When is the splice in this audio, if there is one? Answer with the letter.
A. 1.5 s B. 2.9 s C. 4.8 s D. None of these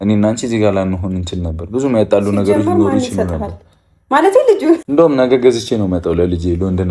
C